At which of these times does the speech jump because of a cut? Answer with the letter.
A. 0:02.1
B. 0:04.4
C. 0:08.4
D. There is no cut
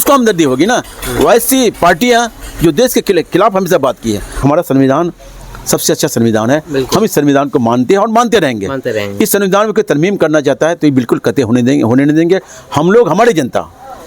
B